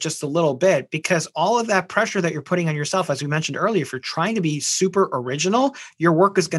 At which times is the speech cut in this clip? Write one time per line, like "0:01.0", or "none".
none